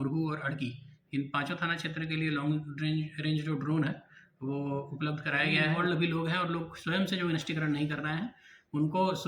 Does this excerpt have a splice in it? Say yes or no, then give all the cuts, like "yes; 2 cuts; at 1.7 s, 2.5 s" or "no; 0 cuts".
yes; 1 cut; at 5.7 s